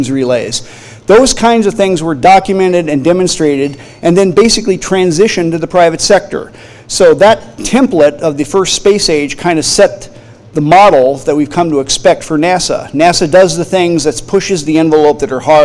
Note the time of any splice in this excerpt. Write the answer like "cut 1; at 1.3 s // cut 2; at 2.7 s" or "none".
cut 1; at 2.1 s